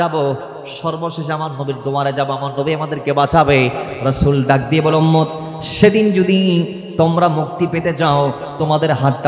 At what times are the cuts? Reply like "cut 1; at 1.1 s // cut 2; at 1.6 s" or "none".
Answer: none